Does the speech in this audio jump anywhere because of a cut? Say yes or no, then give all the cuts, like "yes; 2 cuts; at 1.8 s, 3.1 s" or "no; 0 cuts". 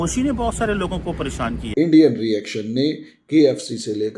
yes; 1 cut; at 1.6 s